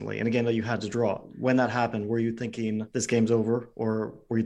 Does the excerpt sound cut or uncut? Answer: cut